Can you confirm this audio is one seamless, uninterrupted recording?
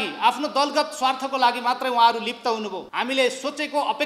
no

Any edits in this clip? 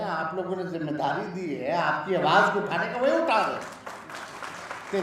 no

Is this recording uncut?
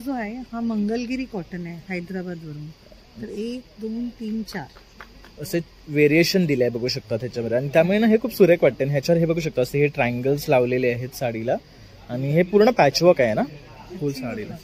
yes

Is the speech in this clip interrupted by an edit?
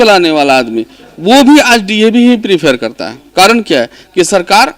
no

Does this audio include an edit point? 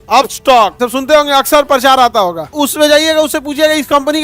yes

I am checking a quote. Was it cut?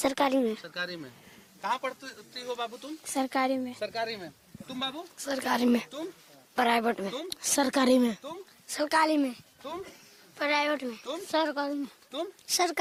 no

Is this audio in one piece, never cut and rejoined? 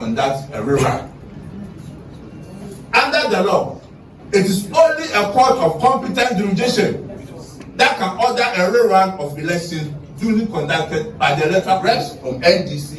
no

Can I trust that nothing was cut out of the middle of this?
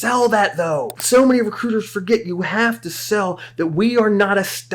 no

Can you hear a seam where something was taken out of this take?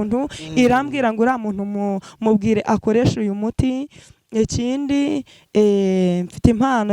no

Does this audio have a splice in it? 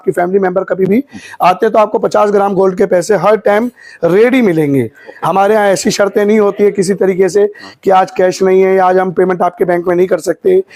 no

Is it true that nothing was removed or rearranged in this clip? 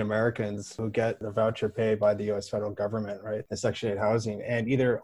no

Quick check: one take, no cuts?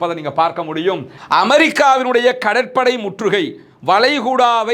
no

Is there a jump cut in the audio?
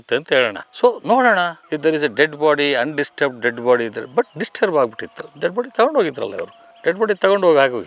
no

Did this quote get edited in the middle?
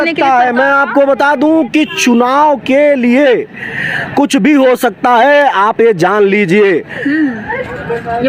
no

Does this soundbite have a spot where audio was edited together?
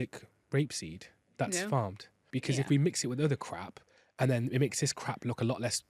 yes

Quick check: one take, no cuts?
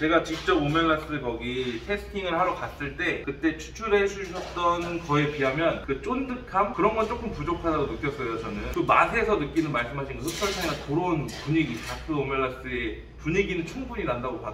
yes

